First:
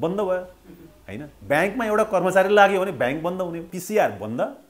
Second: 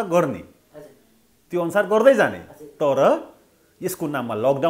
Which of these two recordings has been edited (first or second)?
first